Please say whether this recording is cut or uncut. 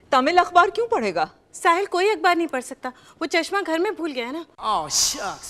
uncut